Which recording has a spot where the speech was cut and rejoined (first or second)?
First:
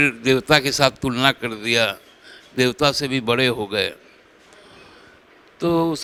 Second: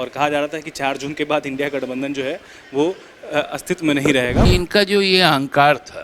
second